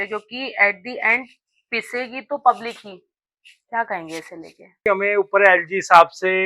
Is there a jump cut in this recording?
yes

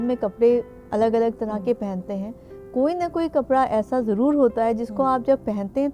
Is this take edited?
no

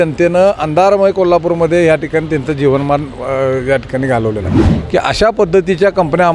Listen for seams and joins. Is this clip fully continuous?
no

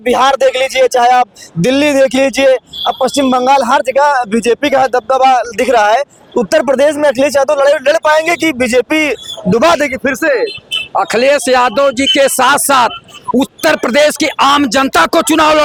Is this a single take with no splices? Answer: yes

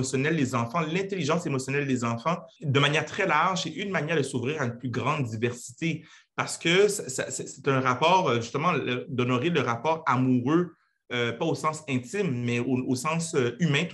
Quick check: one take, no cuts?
no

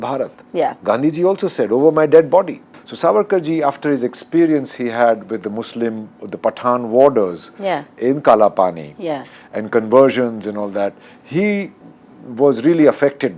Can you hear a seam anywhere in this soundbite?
yes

